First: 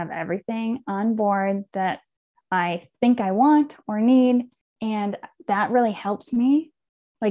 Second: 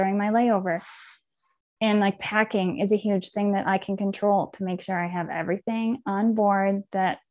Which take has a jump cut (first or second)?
first